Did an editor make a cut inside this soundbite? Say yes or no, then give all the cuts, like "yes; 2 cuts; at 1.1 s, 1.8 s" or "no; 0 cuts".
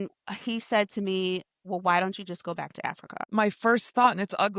yes; 1 cut; at 3.1 s